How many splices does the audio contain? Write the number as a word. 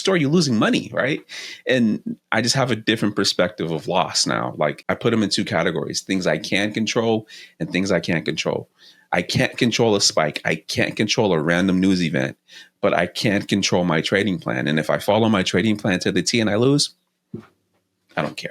one